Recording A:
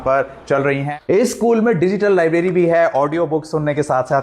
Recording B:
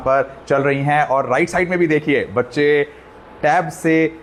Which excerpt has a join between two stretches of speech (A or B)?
A